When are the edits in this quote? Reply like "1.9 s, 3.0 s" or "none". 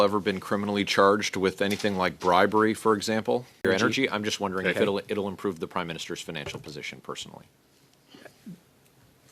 3.6 s